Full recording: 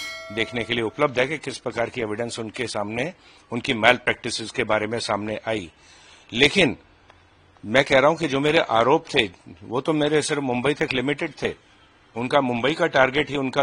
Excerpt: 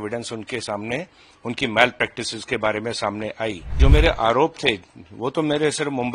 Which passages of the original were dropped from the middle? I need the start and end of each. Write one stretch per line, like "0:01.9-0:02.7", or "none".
0:05.8-0:08.3